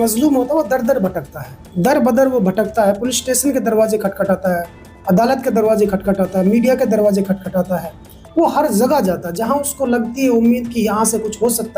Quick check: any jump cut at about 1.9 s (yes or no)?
yes